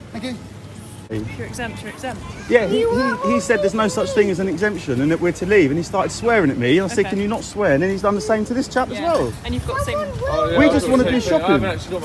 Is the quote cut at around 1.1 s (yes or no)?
yes